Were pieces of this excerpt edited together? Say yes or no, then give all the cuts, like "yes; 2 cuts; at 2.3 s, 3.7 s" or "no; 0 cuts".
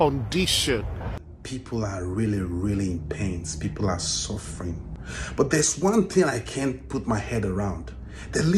yes; 2 cuts; at 1.3 s, 4.9 s